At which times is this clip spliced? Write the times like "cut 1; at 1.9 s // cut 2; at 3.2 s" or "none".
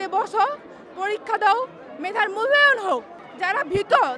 cut 1; at 3.2 s